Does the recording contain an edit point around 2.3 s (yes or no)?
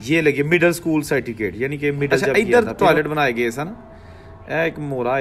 yes